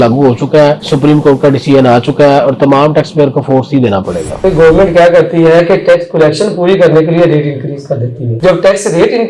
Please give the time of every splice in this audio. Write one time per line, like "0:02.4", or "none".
0:04.4

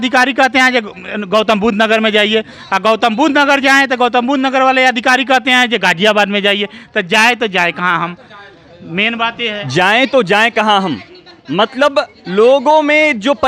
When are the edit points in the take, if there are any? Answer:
none

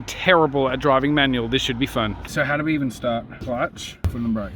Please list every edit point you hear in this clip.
0:02.2
0:03.4

